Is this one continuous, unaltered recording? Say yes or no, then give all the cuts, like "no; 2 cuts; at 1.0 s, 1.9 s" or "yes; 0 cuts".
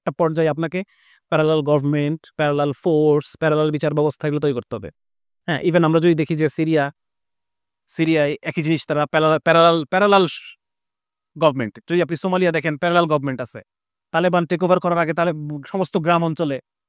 yes; 0 cuts